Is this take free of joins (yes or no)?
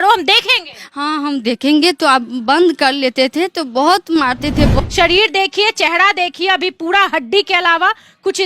no